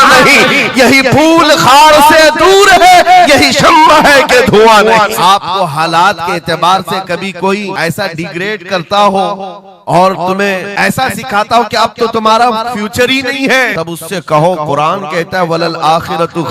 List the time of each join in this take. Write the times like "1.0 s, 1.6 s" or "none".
5.1 s, 7.7 s, 10.7 s, 13.7 s